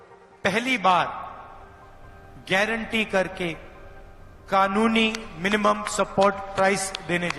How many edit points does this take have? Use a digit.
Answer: 0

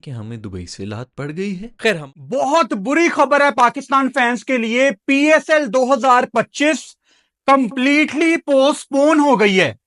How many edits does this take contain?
1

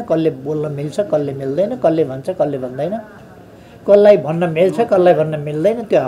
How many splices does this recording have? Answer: 0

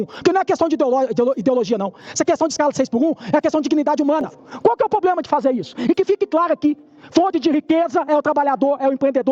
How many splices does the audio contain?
1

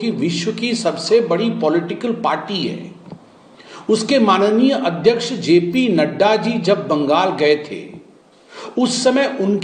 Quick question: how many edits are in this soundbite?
0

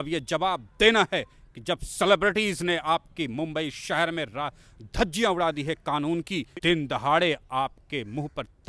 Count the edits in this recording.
1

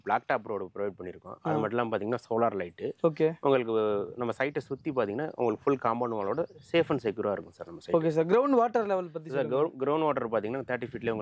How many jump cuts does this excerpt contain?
0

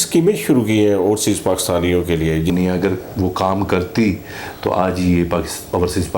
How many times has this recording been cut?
1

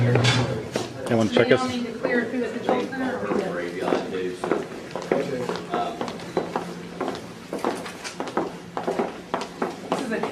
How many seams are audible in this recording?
0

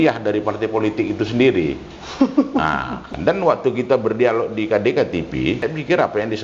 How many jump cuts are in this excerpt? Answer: 2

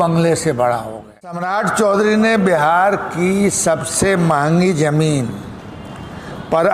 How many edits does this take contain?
1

